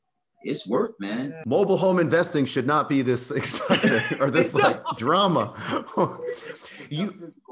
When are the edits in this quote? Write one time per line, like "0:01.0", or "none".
0:01.4